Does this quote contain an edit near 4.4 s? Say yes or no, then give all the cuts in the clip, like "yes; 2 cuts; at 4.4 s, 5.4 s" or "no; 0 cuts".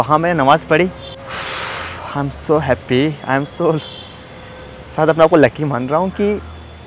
no; 1 cut; at 1.1 s